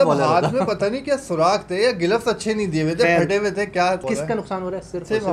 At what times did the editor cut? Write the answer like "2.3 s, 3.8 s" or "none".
4.0 s